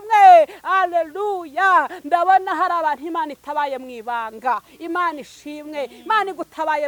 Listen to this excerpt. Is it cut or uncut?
uncut